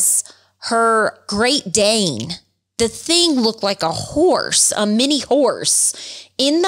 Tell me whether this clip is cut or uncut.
cut